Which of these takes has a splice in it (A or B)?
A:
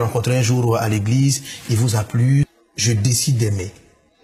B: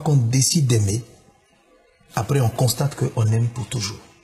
A